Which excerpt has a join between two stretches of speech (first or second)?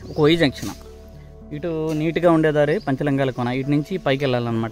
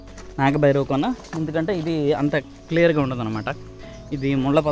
second